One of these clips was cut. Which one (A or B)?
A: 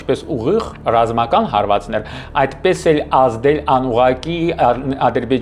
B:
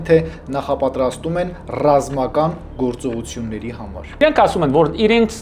B